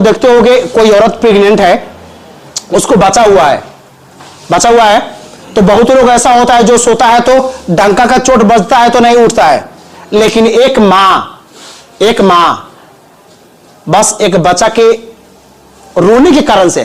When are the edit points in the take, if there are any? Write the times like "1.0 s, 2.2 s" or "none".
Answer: none